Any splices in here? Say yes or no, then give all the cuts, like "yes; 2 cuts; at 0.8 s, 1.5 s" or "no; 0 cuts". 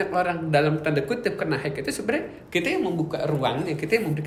no; 0 cuts